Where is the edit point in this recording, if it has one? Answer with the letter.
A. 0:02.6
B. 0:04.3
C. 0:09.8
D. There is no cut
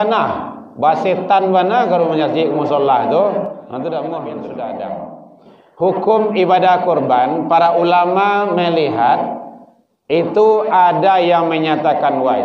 B